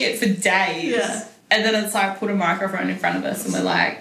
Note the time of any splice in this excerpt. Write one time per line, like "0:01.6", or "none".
0:01.3